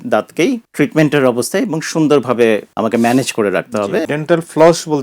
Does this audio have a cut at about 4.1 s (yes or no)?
yes